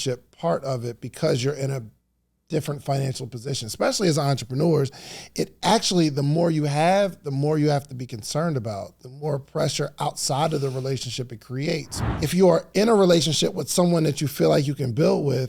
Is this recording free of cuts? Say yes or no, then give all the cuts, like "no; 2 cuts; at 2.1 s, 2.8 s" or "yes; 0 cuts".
no; 1 cut; at 12.0 s